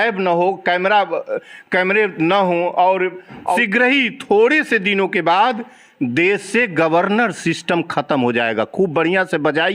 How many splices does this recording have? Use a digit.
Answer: 1